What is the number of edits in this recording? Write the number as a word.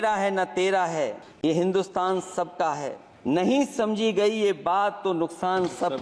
two